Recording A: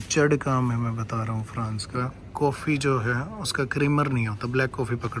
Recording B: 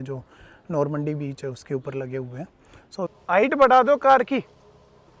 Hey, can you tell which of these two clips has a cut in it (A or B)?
B